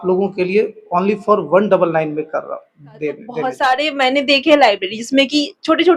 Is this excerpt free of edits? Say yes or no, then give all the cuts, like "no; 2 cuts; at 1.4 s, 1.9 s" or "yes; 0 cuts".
no; 1 cut; at 3.4 s